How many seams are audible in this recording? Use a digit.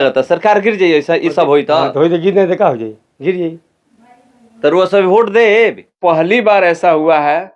1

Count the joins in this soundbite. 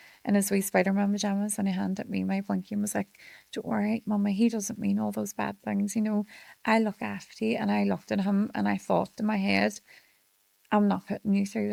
0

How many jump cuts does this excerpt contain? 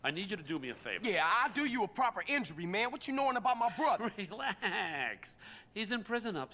1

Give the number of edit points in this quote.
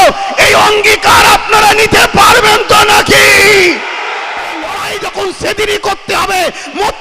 1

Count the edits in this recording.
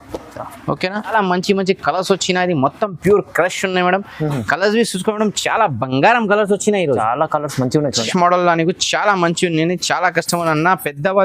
2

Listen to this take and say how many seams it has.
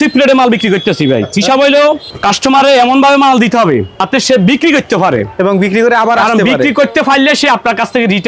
2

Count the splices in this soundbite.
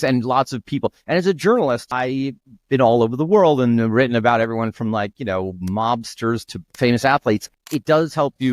2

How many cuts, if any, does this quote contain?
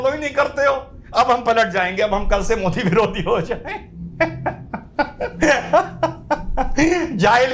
0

